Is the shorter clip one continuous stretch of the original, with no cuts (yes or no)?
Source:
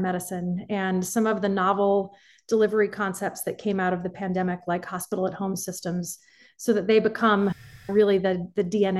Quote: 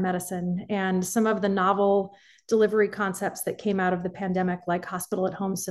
yes